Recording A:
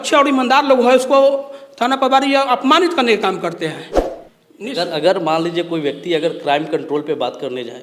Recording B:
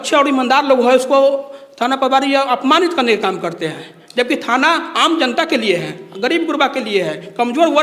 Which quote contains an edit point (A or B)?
A